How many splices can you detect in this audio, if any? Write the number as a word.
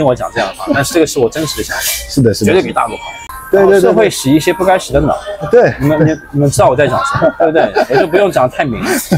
one